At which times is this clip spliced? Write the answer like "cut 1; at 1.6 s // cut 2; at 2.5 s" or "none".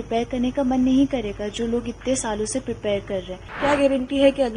cut 1; at 3.5 s